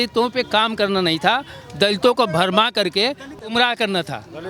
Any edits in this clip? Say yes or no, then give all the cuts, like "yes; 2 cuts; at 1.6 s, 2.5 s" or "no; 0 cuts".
yes; 1 cut; at 3.4 s